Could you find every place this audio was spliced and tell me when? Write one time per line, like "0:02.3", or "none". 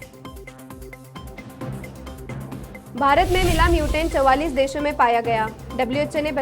0:02.9